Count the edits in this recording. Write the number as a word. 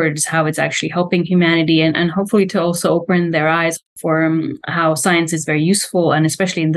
one